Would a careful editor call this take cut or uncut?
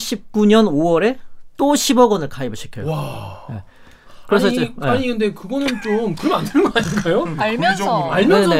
uncut